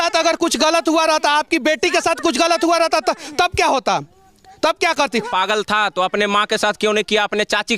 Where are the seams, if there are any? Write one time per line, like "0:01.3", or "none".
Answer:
0:05.3